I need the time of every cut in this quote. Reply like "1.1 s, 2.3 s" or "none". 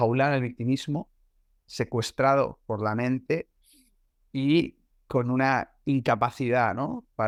none